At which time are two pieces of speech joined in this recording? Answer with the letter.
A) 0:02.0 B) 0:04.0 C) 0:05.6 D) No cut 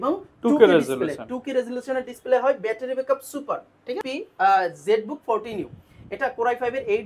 B